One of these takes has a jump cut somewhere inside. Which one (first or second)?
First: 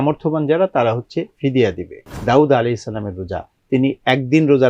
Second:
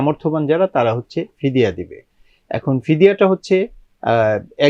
first